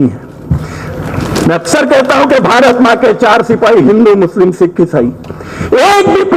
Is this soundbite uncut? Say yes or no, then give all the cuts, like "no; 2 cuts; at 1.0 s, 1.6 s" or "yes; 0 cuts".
yes; 0 cuts